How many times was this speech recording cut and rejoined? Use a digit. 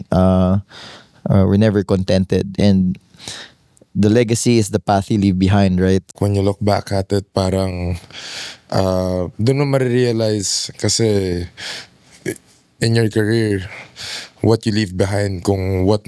1